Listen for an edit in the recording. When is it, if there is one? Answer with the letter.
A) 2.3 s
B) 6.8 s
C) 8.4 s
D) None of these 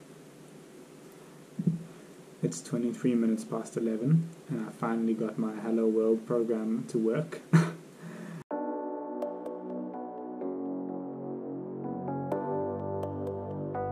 C